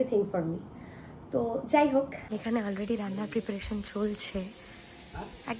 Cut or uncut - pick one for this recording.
cut